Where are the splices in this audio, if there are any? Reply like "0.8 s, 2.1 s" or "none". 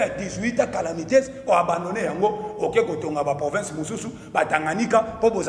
none